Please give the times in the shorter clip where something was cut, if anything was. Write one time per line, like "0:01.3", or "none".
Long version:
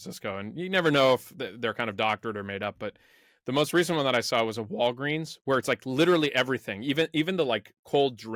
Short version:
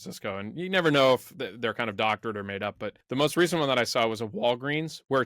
0:02.9

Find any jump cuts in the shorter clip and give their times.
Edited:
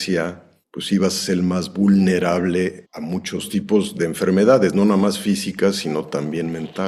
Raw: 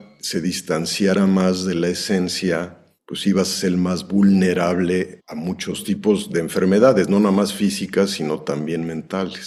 none

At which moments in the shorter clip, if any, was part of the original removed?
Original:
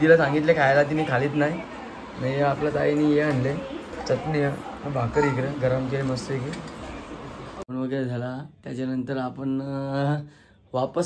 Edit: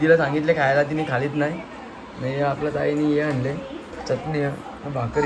none

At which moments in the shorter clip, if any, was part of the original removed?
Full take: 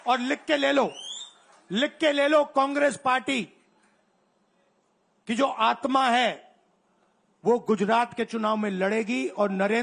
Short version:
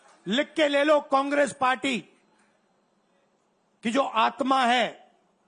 none

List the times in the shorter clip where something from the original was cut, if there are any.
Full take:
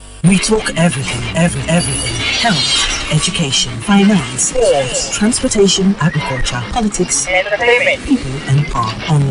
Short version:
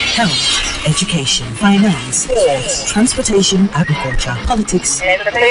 none

